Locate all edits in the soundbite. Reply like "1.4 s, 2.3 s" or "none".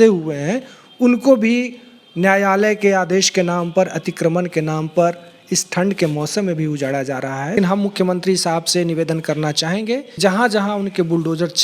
7.6 s, 10.2 s